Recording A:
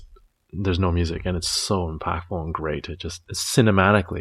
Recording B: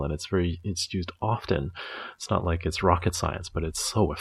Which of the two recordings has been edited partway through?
A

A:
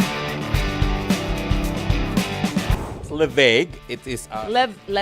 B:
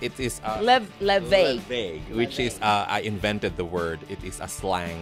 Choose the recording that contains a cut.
A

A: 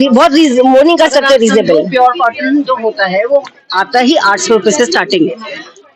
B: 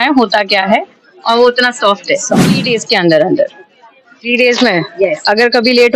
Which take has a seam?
B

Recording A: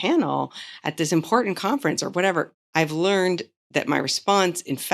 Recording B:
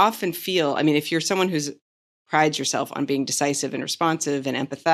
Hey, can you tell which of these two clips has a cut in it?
A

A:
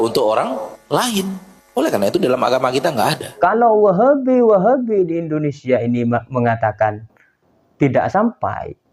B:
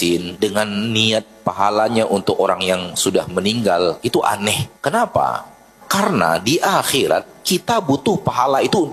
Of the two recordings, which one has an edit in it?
A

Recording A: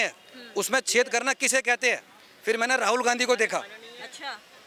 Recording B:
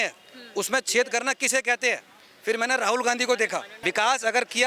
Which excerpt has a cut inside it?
B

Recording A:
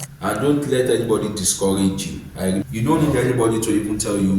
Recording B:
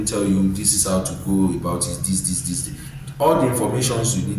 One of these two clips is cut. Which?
A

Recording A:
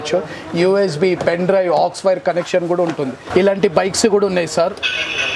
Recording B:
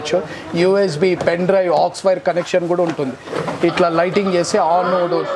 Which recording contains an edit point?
A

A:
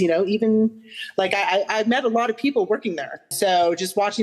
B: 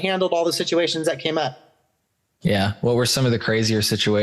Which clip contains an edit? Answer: A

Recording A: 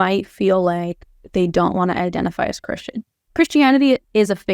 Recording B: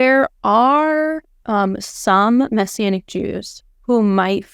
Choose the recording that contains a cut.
A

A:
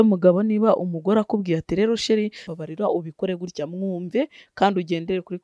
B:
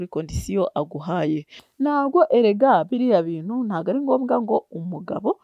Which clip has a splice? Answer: B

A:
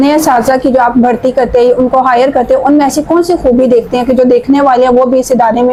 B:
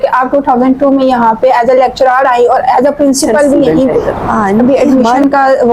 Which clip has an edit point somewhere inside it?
B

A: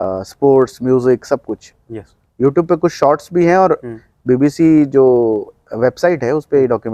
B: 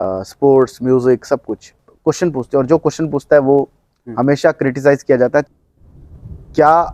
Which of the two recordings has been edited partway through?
B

